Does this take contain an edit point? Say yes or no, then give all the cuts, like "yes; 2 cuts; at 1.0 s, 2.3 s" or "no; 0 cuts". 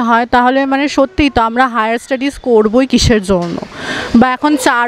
no; 0 cuts